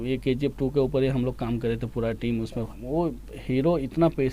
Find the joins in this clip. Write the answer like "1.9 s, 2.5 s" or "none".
2.7 s